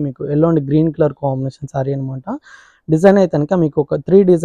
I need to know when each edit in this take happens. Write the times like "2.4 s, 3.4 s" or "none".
none